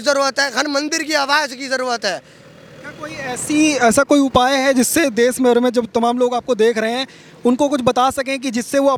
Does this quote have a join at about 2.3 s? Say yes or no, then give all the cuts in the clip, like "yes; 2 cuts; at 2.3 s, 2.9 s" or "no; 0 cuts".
no; 0 cuts